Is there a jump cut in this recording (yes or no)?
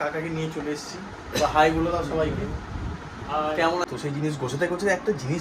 yes